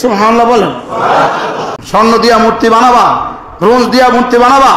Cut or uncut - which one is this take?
cut